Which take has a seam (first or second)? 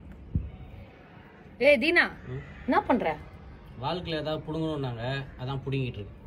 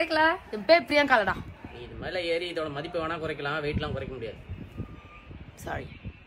second